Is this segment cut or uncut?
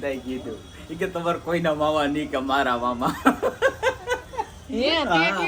uncut